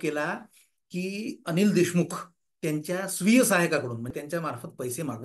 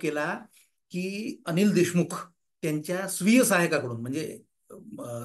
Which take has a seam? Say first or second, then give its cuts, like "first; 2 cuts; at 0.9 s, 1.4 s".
first; 1 cut; at 4.1 s